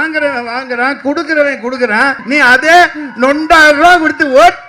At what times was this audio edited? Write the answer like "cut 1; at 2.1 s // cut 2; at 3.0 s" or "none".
cut 1; at 2.2 s